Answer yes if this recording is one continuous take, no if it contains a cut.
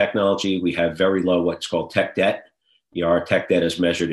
yes